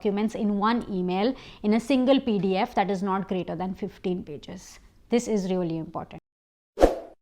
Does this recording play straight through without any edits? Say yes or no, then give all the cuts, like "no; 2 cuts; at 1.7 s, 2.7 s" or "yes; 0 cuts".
no; 1 cut; at 6.3 s